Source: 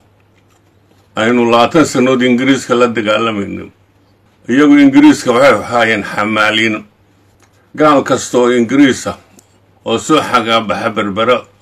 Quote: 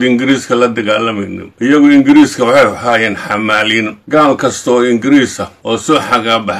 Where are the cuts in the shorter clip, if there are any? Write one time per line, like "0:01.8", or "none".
0:01.7
0:04.0
0:05.8